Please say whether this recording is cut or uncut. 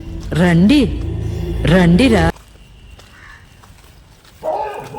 cut